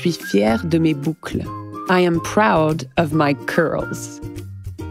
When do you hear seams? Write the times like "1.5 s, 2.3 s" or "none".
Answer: none